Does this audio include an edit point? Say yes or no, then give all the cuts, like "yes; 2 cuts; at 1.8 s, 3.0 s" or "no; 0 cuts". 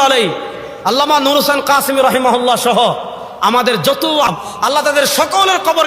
yes; 1 cut; at 4.3 s